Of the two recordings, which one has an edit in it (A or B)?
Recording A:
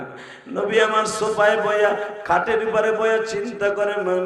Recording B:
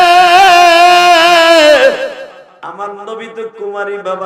B